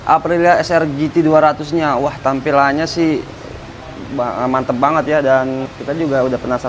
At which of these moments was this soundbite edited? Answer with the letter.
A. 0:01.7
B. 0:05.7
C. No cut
B